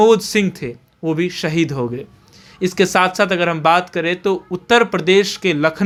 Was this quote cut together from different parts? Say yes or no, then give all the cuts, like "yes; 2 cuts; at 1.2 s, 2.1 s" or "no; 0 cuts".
no; 0 cuts